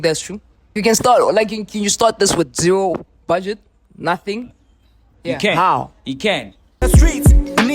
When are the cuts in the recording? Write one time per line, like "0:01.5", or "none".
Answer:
0:06.8